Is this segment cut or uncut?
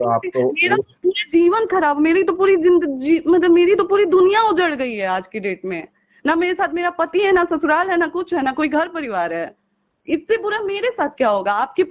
uncut